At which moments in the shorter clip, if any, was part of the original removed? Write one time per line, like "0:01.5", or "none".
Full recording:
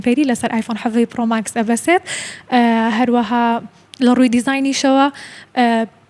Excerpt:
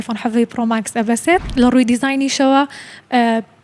0:01.5